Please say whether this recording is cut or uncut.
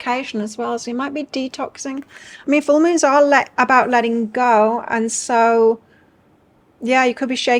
uncut